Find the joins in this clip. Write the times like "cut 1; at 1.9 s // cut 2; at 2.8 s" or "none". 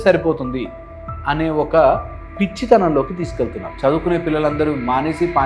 cut 1; at 3.7 s